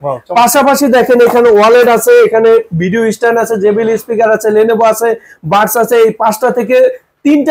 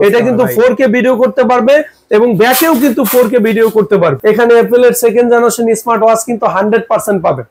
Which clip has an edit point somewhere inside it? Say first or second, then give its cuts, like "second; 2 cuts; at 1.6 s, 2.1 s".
second; 1 cut; at 4.2 s